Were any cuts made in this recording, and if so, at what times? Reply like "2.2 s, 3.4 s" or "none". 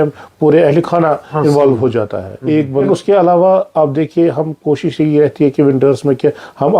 2.9 s